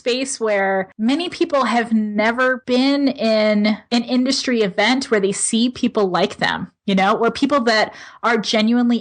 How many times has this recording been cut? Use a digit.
3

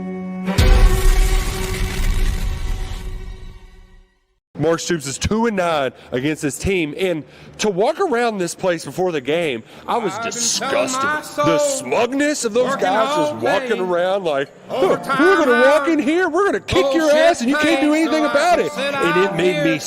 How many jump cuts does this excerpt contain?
1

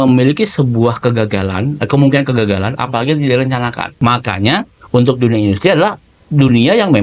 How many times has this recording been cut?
1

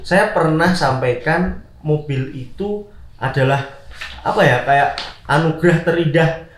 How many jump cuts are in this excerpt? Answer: 0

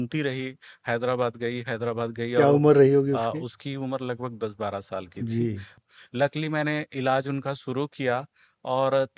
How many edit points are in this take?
1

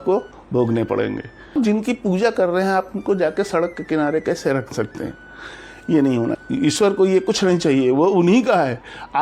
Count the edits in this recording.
2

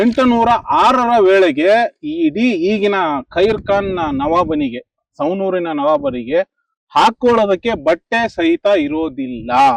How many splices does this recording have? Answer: 0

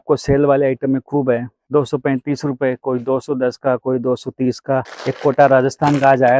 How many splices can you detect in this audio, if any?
1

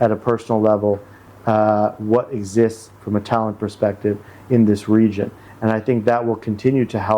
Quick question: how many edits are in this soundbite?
0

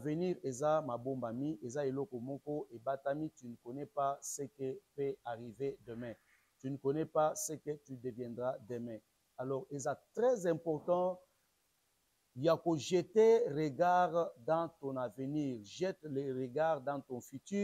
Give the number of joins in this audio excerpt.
0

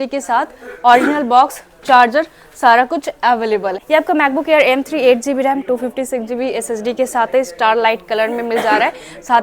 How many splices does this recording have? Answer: 1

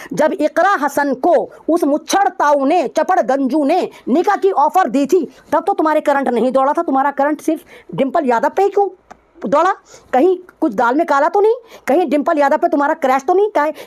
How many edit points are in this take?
0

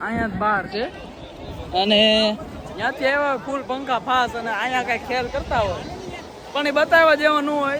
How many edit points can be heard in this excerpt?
0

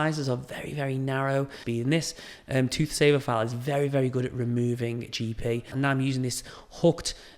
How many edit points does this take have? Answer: 2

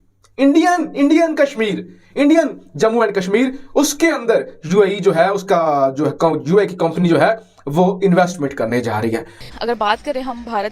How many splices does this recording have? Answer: 1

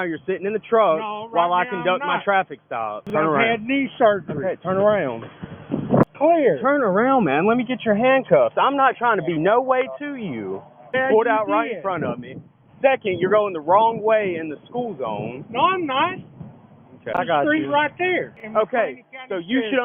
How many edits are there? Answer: 5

